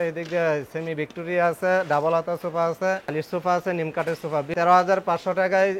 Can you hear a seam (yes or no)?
yes